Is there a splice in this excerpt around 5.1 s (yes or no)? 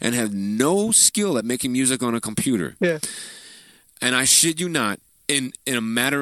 yes